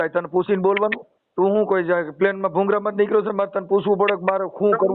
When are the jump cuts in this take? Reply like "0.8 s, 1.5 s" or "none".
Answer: none